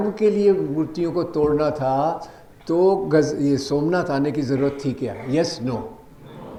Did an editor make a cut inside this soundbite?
no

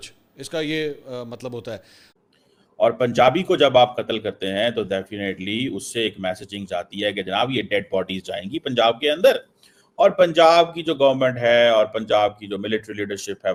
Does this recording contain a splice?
no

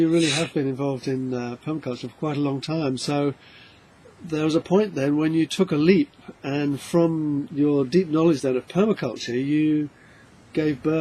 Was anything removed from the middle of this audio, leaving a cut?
no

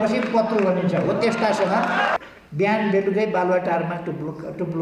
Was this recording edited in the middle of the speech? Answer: yes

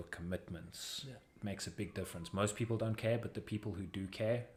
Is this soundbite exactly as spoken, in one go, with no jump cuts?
yes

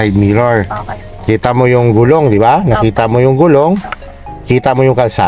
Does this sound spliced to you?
no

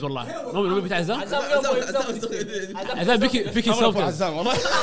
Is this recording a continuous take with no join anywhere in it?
yes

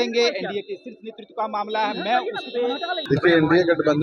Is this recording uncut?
no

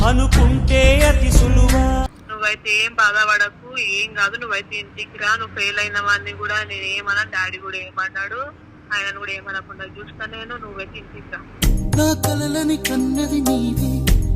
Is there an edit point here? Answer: yes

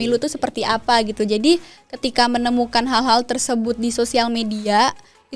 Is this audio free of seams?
yes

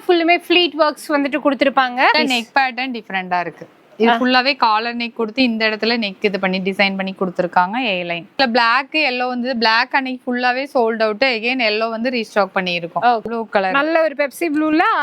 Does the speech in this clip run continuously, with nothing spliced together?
no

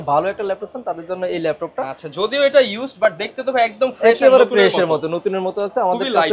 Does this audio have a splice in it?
no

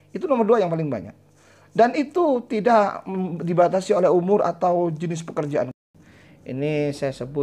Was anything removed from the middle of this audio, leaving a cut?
yes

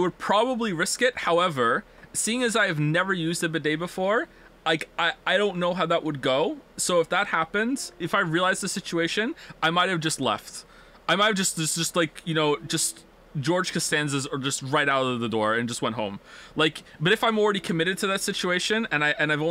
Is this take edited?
yes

